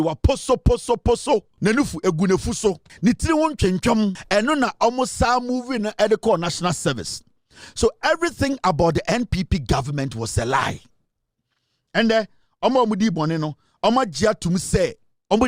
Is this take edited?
yes; 3 cuts; at 1.5 s, 2.9 s, 4.2 s

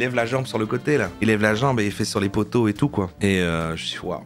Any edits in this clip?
no; 0 cuts

